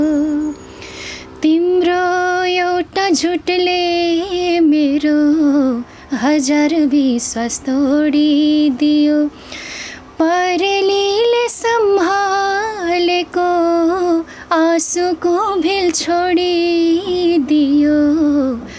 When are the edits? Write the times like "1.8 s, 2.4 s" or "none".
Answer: none